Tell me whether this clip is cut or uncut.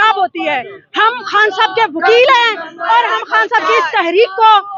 uncut